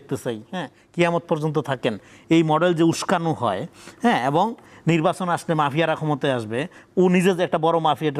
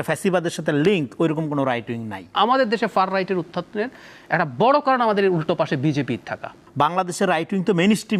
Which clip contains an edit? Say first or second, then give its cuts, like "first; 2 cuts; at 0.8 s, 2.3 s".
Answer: second; 2 cuts; at 2.3 s, 6.6 s